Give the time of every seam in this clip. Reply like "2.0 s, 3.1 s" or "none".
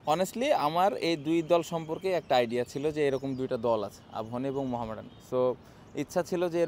none